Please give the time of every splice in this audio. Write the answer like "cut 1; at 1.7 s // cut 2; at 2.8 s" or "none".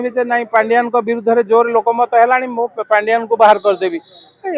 none

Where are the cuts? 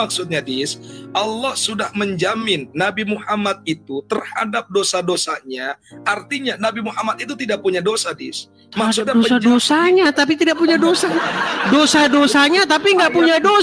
none

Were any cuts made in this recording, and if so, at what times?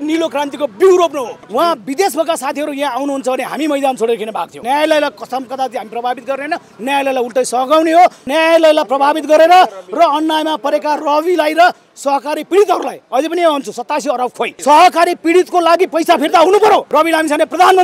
cut 1; at 1.4 s // cut 2; at 4.6 s // cut 3; at 8.2 s // cut 4; at 14.5 s // cut 5; at 16.9 s

